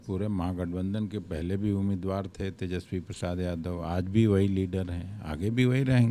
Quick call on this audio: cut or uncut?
uncut